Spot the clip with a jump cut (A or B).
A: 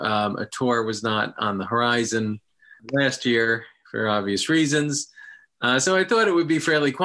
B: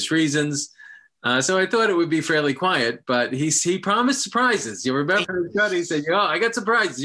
B